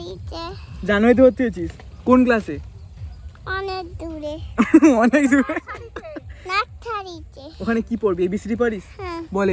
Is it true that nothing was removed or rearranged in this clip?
yes; 0 cuts

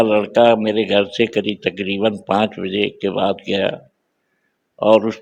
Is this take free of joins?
yes; 0 cuts

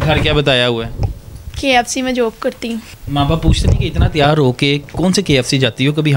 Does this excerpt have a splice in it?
yes; 1 cut; at 2.9 s

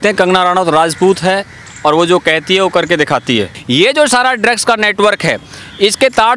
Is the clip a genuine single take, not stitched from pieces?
no; 1 cut; at 3.6 s

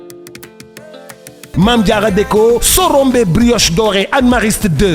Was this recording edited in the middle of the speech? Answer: yes; 1 cut; at 1.5 s

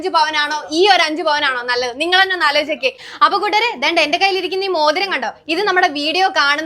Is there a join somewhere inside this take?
yes; 1 cut; at 3.1 s

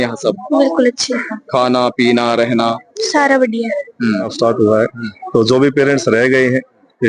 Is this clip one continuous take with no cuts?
no; 1 cut; at 4.3 s

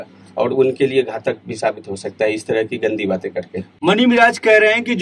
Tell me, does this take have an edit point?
no; 0 cuts

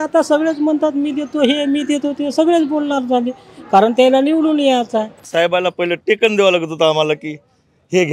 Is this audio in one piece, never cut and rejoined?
no; 1 cut; at 5.2 s

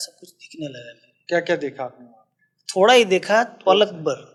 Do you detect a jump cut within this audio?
no; 0 cuts

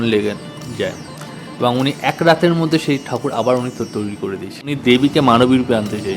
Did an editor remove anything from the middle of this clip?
yes; 1 cut; at 4.7 s

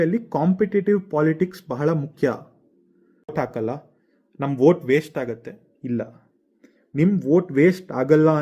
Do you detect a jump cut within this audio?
yes; 1 cut; at 3.3 s

